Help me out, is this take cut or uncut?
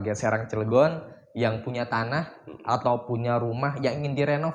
uncut